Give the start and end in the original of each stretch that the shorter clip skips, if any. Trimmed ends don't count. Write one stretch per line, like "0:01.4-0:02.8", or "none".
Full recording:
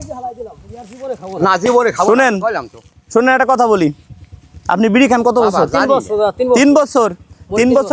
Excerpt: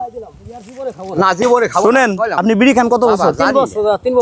0:02.6-0:04.7